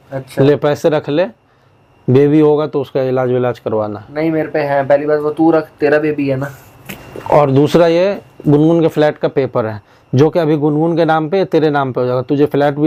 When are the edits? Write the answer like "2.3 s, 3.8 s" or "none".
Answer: none

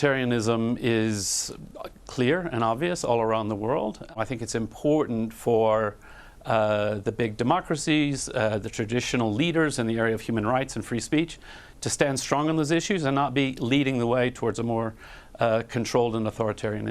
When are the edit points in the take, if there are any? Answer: 4.1 s

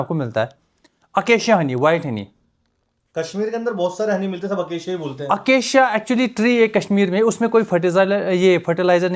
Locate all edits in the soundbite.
none

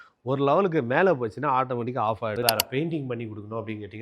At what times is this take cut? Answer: 2.4 s

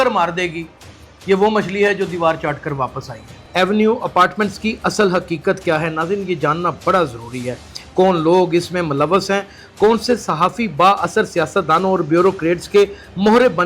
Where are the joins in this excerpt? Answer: 3.4 s

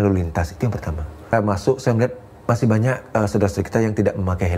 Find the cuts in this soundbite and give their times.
1.3 s

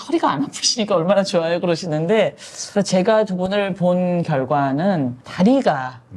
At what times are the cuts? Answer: none

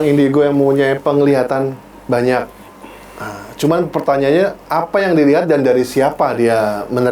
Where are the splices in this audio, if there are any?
none

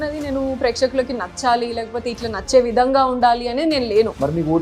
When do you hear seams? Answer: none

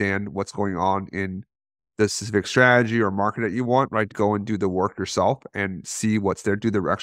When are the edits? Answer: 4.1 s

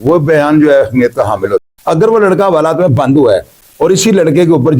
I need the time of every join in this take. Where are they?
1.6 s

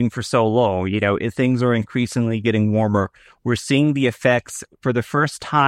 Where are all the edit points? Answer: 4.7 s

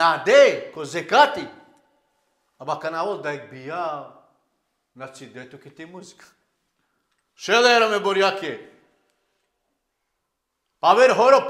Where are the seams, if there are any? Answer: none

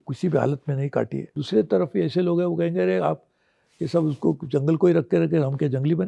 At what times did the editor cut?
1.2 s

